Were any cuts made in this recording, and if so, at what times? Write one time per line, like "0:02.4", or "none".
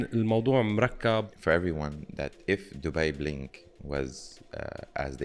0:01.3